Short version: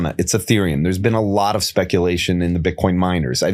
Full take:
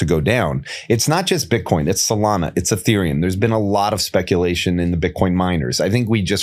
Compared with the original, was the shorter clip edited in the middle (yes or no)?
no